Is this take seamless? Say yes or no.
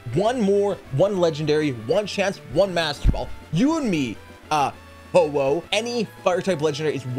no